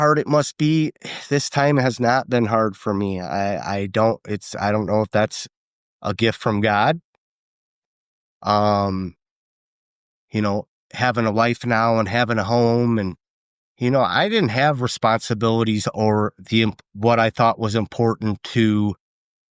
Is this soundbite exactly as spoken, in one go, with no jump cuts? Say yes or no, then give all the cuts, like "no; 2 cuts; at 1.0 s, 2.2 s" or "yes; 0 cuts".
yes; 0 cuts